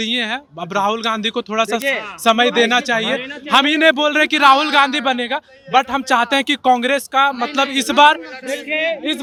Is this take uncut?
yes; 0 cuts

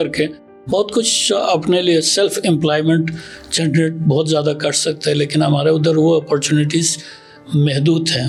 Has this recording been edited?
no; 0 cuts

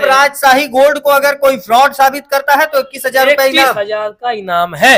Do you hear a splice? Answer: no; 0 cuts

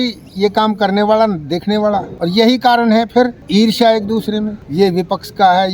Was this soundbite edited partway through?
yes; 3 cuts; at 2.1 s, 3.4 s, 4.6 s

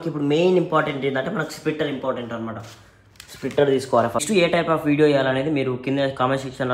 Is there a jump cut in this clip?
yes; 1 cut; at 4.2 s

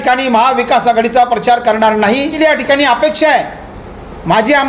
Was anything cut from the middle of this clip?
yes; 1 cut; at 2.3 s

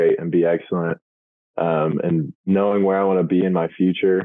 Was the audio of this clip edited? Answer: no; 0 cuts

